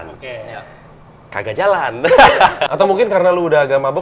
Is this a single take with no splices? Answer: no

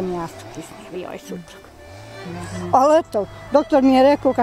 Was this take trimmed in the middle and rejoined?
yes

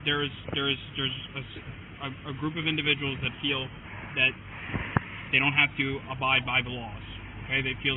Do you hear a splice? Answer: no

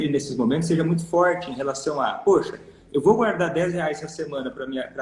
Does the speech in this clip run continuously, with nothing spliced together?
yes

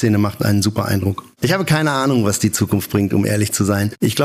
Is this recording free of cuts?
yes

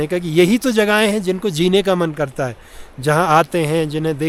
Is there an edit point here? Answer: no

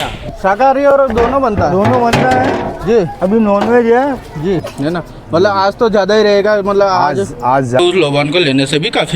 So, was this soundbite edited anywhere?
yes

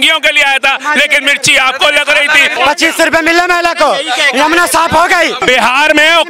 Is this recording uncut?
no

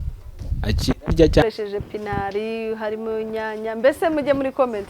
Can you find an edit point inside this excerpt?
yes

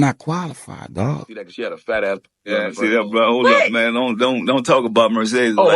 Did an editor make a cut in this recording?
yes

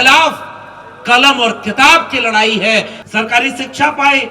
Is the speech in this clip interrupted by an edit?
yes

